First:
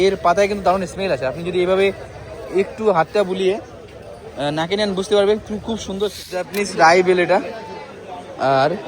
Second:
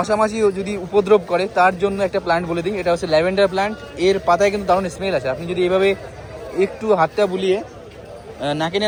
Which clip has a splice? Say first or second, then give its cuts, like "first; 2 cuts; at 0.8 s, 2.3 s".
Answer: first; 1 cut; at 6.5 s